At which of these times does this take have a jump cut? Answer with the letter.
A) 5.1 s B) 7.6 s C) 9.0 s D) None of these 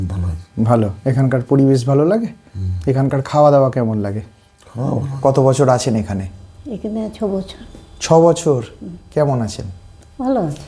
A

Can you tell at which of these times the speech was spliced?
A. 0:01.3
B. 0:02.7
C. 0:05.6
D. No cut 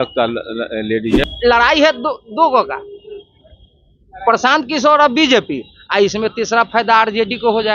A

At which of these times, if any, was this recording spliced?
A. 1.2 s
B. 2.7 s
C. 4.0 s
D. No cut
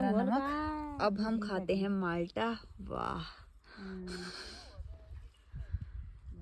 D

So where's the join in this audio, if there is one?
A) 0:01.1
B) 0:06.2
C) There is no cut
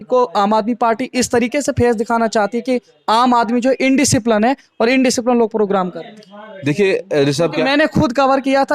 C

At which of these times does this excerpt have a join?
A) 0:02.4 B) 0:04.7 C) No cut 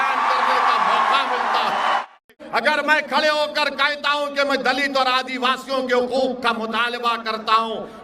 A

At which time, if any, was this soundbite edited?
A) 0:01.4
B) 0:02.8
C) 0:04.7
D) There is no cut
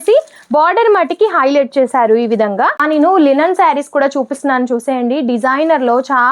B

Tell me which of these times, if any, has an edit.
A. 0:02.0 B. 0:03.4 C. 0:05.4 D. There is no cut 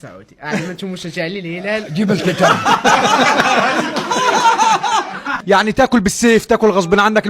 C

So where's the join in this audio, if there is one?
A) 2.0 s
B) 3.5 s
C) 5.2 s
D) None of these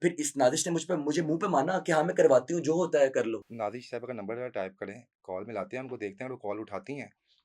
B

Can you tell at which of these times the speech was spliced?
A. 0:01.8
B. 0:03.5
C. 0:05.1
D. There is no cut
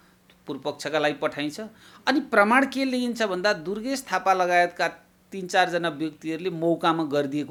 D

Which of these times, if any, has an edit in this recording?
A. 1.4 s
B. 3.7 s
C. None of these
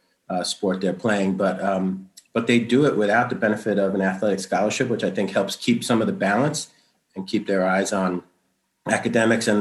C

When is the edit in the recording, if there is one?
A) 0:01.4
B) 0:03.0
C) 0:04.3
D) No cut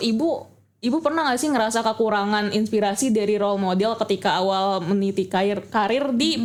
D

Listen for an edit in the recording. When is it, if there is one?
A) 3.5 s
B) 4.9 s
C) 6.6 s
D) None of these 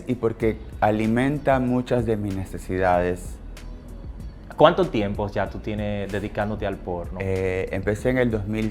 D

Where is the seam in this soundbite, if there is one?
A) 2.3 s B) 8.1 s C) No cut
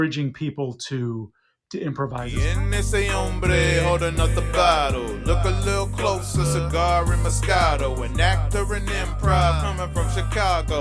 A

